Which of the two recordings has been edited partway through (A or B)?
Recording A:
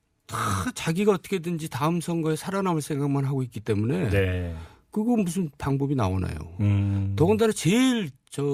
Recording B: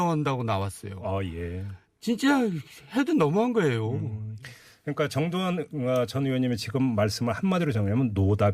B